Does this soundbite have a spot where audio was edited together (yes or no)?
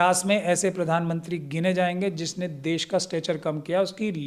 no